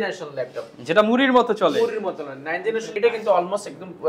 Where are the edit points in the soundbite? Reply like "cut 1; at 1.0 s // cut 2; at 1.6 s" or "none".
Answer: cut 1; at 2.9 s

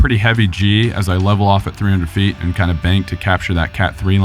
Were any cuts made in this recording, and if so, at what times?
none

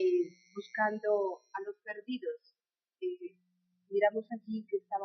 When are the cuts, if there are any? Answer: cut 1; at 2.6 s

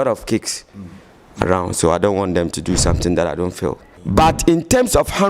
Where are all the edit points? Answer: cut 1; at 3.9 s

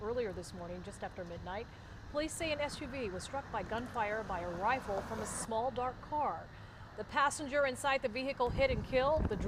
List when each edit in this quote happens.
none

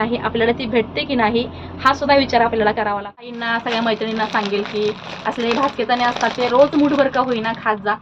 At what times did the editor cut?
cut 1; at 3.3 s

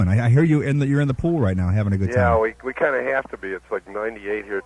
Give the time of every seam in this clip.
cut 1; at 1.4 s

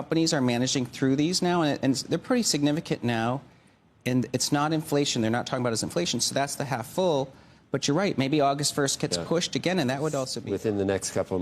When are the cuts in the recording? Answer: cut 1; at 10.4 s

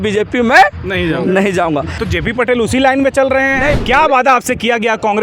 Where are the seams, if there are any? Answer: cut 1; at 2.0 s // cut 2; at 3.8 s

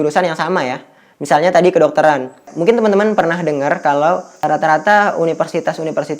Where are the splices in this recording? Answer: cut 1; at 2.5 s

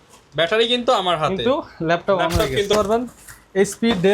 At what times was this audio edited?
cut 1; at 2.7 s

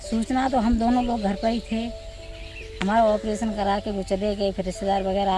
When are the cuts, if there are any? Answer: none

